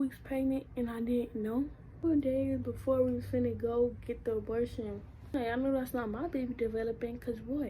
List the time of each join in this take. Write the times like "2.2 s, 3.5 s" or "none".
2.0 s, 5.3 s